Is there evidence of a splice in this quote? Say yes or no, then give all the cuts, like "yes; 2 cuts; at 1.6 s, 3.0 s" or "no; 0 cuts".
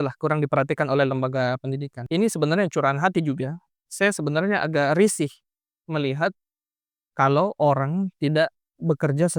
yes; 1 cut; at 2.0 s